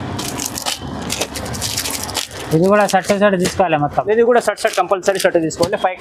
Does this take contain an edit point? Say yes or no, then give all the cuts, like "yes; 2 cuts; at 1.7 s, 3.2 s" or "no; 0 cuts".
no; 0 cuts